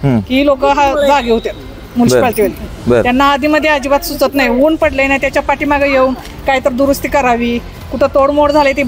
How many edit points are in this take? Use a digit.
0